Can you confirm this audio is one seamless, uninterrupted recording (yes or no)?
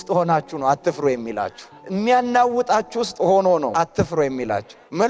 yes